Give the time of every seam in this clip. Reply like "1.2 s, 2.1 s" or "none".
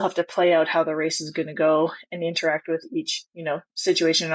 none